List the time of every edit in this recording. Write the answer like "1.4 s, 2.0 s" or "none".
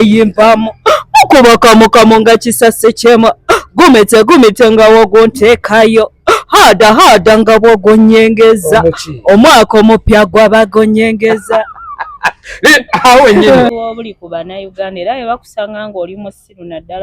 13.7 s

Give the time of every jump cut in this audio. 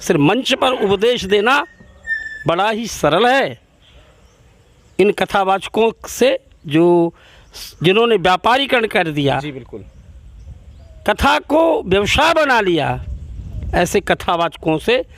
none

